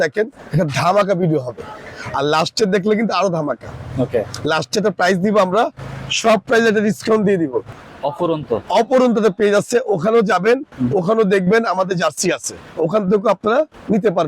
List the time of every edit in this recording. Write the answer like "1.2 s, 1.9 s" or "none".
7.6 s